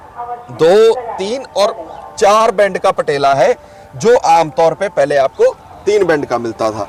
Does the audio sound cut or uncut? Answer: uncut